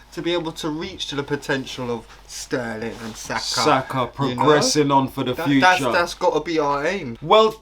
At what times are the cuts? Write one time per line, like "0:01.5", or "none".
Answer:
none